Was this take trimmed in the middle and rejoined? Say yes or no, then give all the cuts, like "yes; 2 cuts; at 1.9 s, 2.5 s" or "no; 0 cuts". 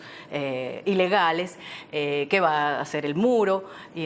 yes; 1 cut; at 2.5 s